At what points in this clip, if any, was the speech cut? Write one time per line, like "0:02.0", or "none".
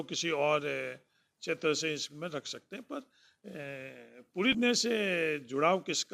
0:04.5